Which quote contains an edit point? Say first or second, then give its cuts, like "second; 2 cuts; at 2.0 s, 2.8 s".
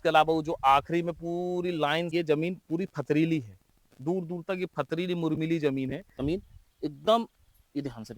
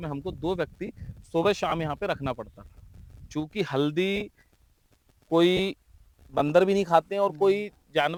first; 2 cuts; at 2.1 s, 6.2 s